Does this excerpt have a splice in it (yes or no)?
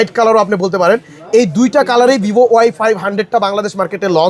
no